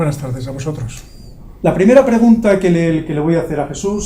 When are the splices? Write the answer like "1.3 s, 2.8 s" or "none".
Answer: 1.4 s